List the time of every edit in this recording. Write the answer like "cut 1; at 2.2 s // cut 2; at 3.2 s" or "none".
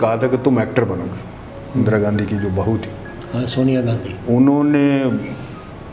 cut 1; at 1.6 s

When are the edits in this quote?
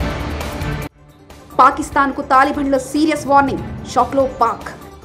cut 1; at 1.0 s

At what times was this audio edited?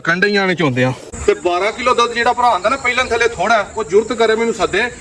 cut 1; at 1.1 s

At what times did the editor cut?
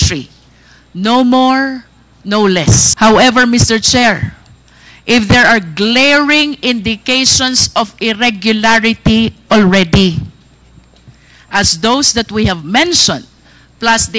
cut 1; at 2.9 s

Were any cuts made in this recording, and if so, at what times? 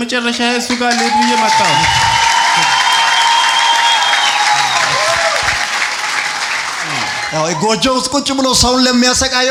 none

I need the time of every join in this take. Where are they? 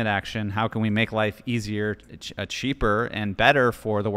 none

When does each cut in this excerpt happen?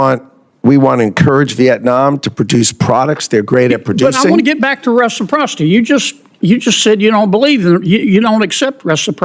none

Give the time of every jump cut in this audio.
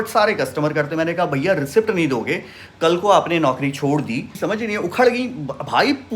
cut 1; at 4.3 s

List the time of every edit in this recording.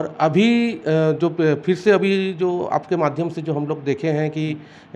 none

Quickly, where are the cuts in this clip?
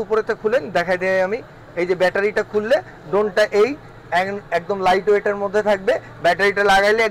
none

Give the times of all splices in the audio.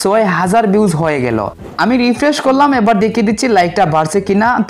cut 1; at 1.8 s

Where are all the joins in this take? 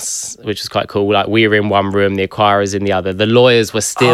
none

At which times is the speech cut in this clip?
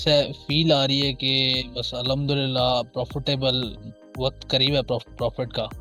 none

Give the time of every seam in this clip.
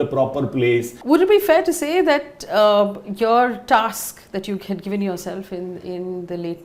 cut 1; at 0.9 s

